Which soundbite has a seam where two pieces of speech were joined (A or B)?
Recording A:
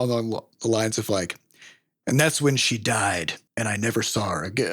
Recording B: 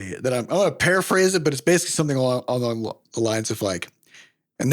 A